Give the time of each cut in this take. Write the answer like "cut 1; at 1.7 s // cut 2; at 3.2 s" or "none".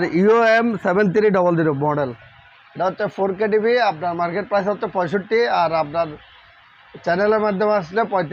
none